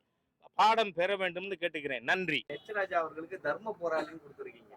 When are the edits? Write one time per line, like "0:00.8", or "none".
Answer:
0:02.5